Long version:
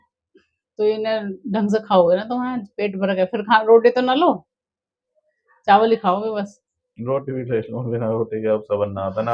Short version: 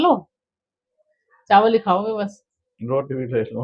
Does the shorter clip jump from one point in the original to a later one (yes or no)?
no